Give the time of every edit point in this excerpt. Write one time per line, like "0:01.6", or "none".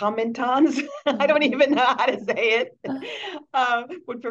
none